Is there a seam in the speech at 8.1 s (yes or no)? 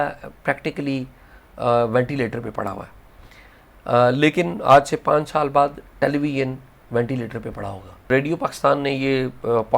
yes